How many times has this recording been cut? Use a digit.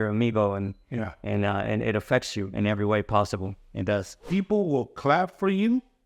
1